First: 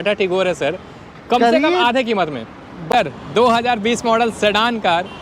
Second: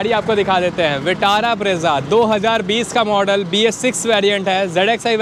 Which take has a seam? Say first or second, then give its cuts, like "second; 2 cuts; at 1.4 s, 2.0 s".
first; 1 cut; at 2.8 s